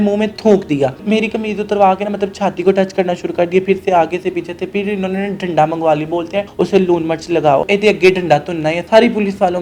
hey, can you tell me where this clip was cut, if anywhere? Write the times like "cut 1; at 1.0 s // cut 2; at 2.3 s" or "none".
cut 1; at 1.0 s // cut 2; at 6.5 s // cut 3; at 7.6 s // cut 4; at 8.8 s